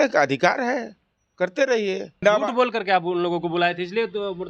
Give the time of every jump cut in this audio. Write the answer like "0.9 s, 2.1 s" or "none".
2.2 s